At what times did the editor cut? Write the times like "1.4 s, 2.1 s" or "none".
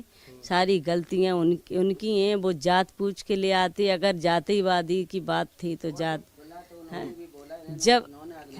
none

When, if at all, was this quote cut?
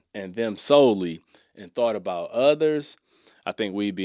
none

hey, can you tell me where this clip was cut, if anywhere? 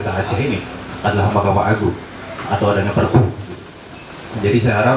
none

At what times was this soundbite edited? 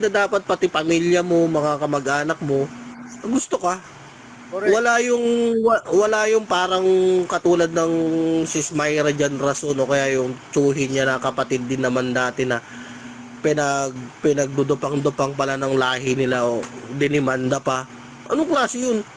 none

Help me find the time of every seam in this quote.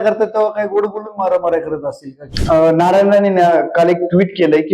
2.2 s

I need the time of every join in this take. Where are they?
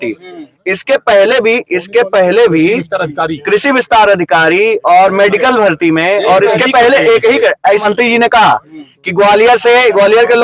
7.8 s

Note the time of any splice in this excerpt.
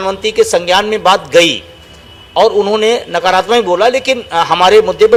none

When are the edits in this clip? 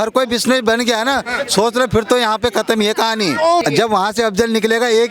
3.6 s

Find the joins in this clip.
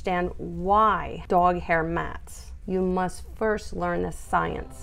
1.1 s

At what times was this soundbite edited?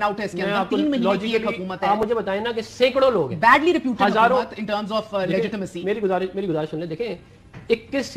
none

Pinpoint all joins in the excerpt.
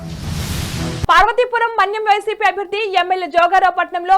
none

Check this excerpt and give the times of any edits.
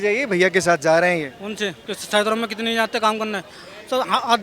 1.9 s

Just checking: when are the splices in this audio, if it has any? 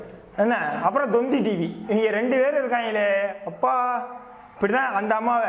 none

